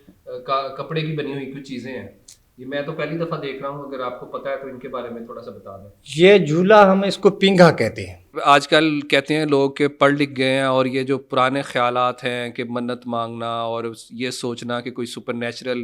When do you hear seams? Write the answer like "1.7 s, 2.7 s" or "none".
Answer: 8.4 s